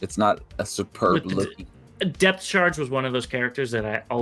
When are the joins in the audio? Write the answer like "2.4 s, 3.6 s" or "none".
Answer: 1.5 s